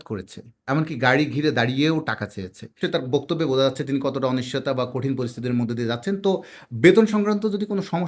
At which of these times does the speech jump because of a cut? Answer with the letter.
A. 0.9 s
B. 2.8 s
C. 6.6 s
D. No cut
B